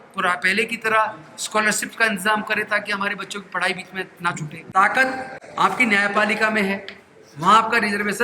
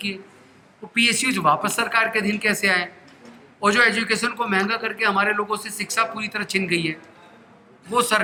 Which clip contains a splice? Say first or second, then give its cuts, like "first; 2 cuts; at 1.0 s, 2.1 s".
first; 2 cuts; at 4.5 s, 5.4 s